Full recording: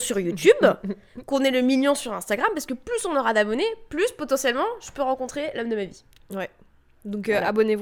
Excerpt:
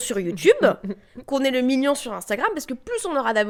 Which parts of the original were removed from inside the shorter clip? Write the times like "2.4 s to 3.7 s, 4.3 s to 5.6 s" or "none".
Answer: none